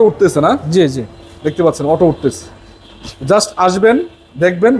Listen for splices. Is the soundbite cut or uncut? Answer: uncut